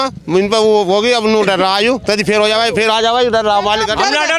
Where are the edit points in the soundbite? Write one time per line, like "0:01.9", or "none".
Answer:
none